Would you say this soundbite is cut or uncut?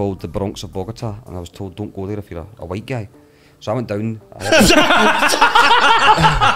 uncut